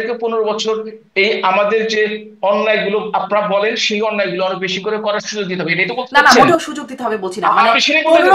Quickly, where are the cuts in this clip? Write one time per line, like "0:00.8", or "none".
none

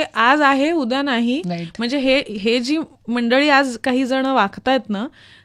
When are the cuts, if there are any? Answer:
none

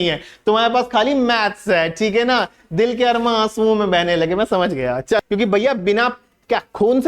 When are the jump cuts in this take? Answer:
0:05.2

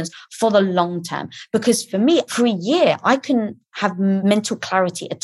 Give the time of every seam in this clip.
0:02.3
0:04.2

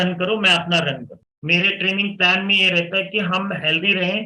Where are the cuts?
0:01.1

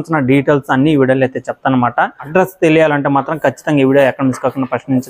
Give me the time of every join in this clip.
none

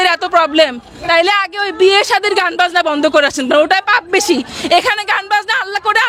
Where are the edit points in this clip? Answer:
none

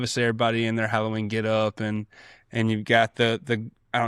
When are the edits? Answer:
none

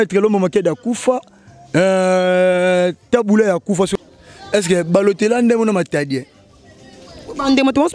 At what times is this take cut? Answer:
0:03.9

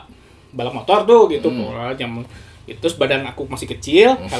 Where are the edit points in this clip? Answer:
0:02.8

